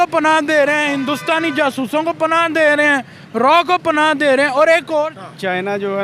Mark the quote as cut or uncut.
cut